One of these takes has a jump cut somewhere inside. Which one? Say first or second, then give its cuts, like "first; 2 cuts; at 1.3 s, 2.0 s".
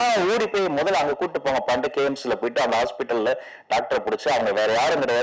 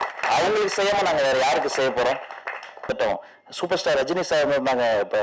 second; 1 cut; at 2.9 s